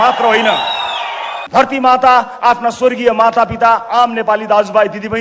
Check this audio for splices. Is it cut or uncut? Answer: cut